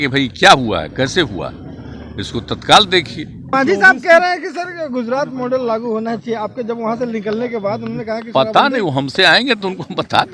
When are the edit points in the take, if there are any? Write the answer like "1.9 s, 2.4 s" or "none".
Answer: 3.5 s